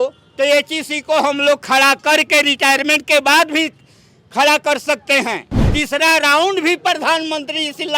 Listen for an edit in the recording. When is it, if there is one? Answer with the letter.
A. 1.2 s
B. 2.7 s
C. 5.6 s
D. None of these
C